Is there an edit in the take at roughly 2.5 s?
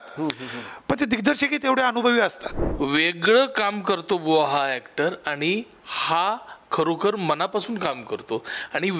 yes; 1 cut; at 2.5 s

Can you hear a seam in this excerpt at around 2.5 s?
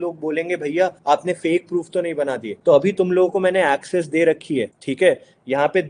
yes; 3 cuts; at 1.0 s, 2.5 s, 4.8 s

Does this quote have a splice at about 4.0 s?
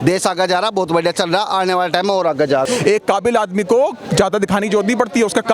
no; 1 cut; at 2.6 s

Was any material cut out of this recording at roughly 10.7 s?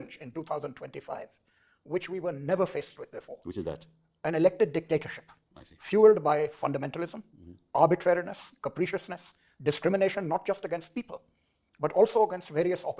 no; 0 cuts

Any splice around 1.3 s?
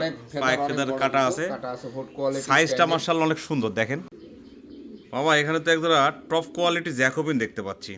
no; 1 cut; at 4.2 s

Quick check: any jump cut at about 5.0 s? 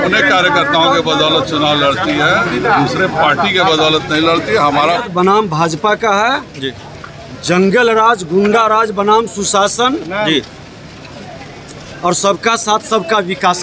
yes; 1 cut; at 5.0 s

